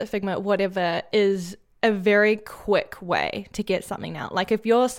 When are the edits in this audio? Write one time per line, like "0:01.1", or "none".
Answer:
none